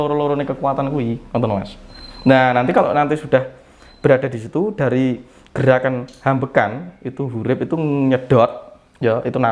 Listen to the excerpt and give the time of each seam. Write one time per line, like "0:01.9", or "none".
none